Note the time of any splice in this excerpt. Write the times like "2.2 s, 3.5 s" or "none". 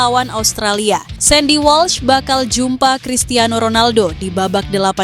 1.1 s